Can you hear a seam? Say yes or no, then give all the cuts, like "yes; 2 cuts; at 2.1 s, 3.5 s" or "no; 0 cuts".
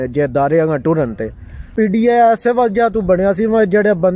yes; 1 cut; at 1.7 s